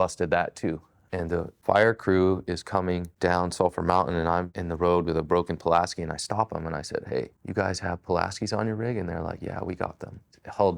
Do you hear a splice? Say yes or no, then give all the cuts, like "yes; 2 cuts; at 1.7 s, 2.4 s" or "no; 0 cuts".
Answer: yes; 4 cuts; at 1.1 s, 3.1 s, 4.6 s, 7.4 s